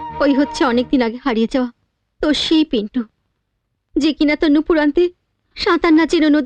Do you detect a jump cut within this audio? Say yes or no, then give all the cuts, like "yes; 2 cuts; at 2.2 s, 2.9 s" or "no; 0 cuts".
no; 0 cuts